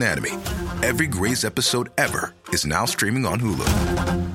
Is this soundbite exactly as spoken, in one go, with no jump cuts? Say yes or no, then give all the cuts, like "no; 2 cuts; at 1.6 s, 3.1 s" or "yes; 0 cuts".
yes; 0 cuts